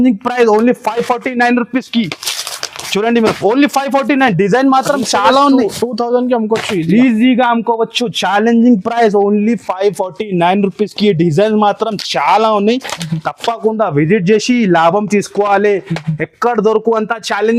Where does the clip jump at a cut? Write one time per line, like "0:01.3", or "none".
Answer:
none